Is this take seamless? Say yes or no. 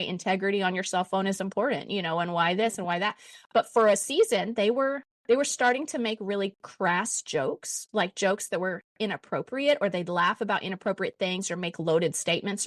yes